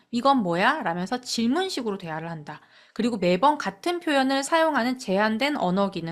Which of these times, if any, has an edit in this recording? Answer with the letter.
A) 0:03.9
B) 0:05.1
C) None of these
C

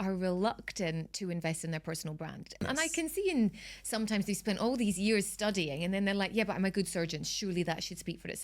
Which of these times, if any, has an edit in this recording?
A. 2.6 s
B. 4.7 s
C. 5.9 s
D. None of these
A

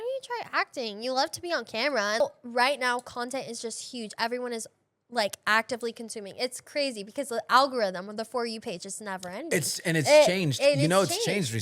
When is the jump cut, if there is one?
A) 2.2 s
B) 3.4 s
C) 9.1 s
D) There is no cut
A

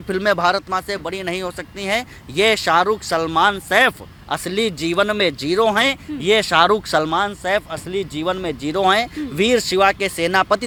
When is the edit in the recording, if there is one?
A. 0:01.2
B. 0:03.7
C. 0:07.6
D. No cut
D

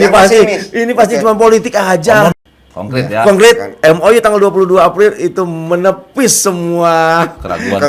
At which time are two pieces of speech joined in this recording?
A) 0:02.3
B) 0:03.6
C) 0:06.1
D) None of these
A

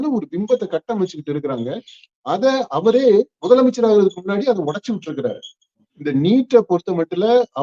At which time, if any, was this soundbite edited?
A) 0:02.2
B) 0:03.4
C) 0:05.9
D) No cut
C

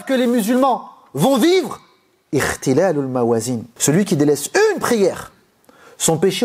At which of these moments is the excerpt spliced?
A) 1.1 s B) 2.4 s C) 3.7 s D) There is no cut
C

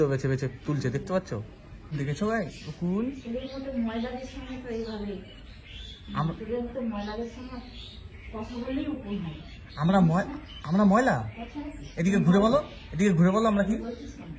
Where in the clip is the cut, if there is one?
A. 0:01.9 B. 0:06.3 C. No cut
A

